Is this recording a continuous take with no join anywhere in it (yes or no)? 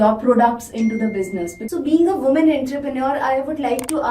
no